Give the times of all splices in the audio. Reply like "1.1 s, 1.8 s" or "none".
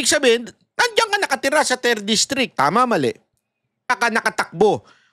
3.9 s